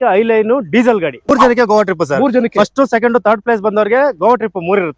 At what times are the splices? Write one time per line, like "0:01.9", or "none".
0:01.3